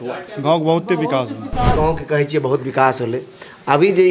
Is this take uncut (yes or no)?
no